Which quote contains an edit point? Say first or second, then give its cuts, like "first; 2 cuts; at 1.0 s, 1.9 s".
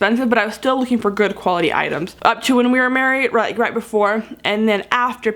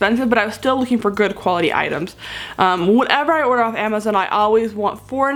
first; 1 cut; at 2.1 s